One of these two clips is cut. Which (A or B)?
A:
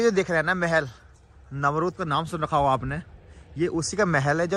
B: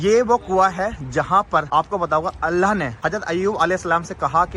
B